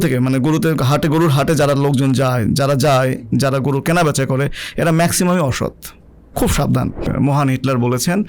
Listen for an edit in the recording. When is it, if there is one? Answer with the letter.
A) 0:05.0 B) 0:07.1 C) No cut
B